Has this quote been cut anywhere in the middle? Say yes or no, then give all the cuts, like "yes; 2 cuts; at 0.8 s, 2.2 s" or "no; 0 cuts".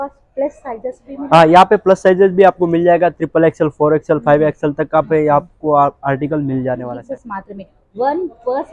yes; 1 cut; at 6.9 s